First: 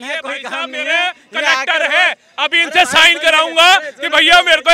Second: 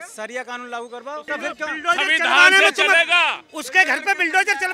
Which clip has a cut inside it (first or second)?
second